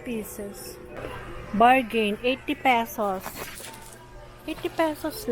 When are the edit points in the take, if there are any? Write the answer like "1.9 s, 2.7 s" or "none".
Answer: 1.0 s